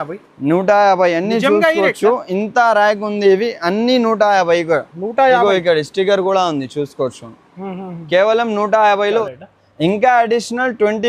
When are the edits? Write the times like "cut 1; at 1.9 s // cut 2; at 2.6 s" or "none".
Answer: cut 1; at 9.3 s

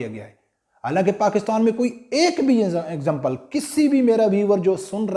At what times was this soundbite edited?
none

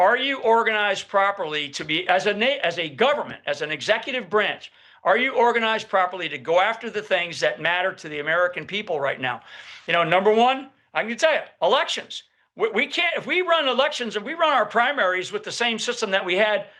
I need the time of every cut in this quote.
none

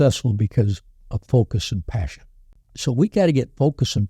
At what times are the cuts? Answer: cut 1; at 2.6 s

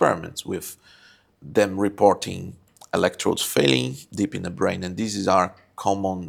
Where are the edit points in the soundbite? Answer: none

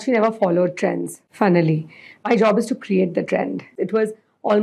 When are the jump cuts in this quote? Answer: cut 1; at 1.2 s // cut 2; at 2.2 s // cut 3; at 3.8 s

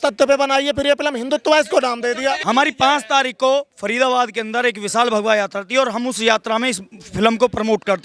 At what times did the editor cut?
cut 1; at 2.4 s

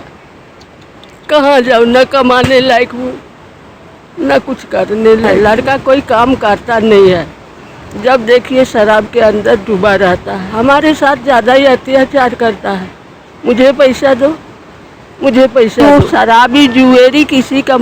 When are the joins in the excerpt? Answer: cut 1; at 5.3 s // cut 2; at 10.4 s // cut 3; at 15.8 s

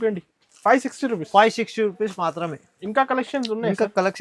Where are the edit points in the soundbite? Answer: none

